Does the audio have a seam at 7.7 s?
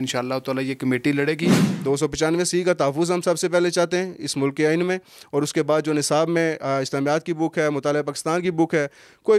no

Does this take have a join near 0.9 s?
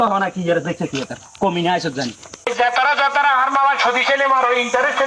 no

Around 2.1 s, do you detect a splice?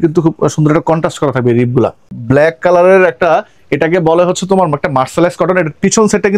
yes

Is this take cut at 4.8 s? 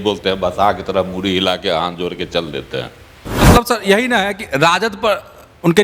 no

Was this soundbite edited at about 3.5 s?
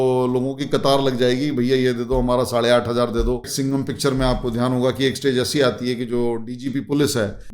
yes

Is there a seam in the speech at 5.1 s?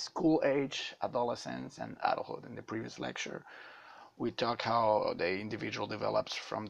no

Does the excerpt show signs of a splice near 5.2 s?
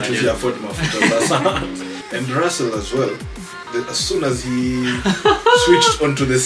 no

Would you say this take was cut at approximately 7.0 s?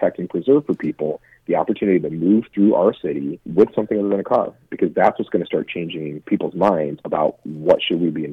yes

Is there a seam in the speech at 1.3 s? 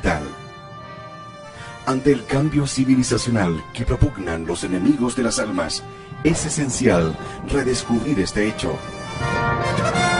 no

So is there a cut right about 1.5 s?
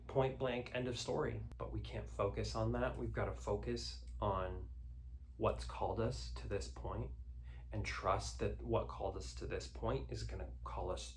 yes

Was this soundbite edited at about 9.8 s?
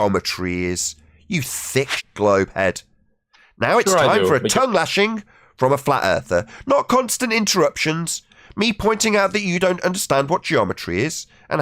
no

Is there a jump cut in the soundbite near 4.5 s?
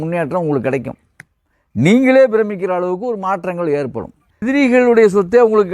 yes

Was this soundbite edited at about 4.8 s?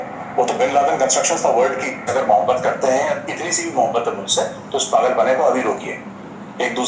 no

